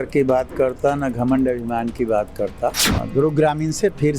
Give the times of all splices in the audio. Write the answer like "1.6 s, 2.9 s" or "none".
2.9 s